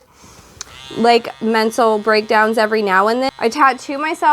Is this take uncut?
no; 1 cut; at 3.3 s

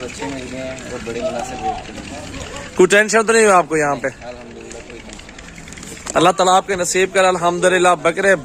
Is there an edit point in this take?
no; 0 cuts

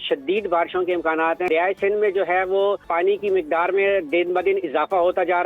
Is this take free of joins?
no; 2 cuts; at 1.5 s, 2.9 s

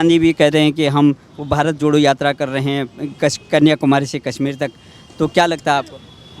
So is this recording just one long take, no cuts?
yes; 0 cuts

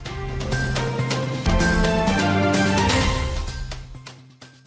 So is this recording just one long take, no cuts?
no; 1 cut; at 1.5 s

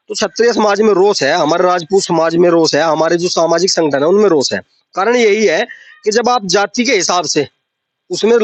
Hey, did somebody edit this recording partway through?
no; 0 cuts

